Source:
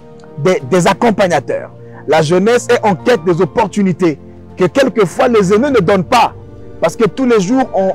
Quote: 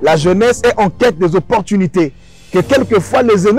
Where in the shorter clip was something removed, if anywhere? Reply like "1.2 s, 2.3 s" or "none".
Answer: none